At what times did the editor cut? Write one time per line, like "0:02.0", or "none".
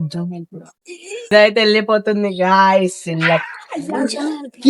0:01.3